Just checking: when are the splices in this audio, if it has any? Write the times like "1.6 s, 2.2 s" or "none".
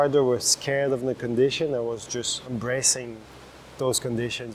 none